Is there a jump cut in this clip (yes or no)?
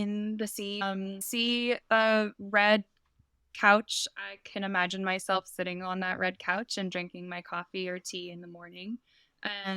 yes